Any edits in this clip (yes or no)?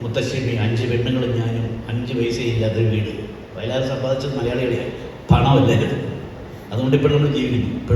no